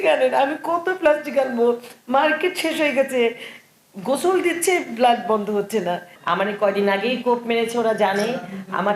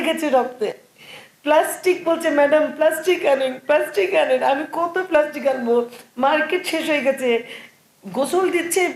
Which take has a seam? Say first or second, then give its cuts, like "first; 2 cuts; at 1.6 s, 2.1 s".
first; 1 cut; at 6.1 s